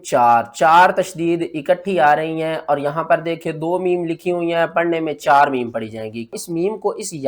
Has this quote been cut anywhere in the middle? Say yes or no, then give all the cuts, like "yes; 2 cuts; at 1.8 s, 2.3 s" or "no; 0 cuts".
yes; 1 cut; at 6.4 s